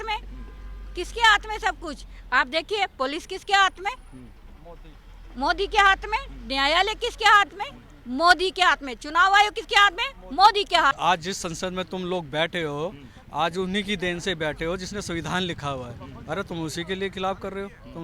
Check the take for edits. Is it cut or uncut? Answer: cut